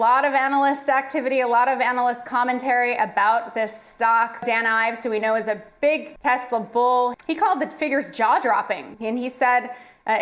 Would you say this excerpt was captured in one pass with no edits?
no; 4 cuts; at 4.4 s, 6.1 s, 7.2 s, 8.9 s

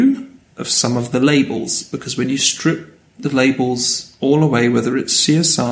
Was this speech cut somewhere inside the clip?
no; 0 cuts

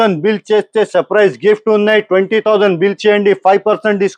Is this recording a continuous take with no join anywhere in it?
yes; 0 cuts

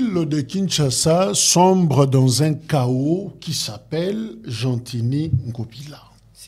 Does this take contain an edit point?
no; 0 cuts

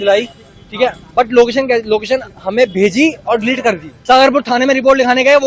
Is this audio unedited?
no; 1 cut; at 3.9 s

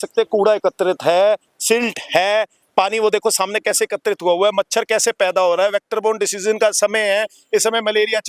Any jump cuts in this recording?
no; 0 cuts

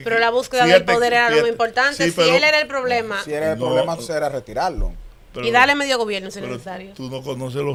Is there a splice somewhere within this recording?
no; 0 cuts

